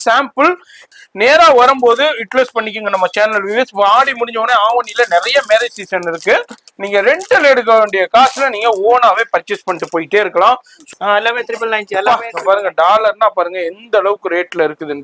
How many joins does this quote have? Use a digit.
2